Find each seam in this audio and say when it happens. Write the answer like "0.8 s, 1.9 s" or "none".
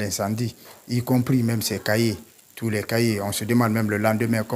none